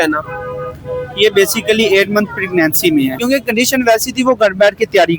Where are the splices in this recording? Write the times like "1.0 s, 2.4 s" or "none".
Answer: 3.2 s